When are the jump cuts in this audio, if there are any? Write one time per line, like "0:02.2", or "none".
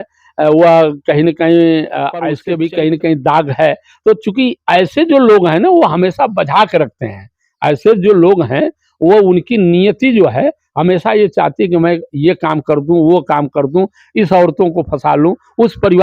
0:02.3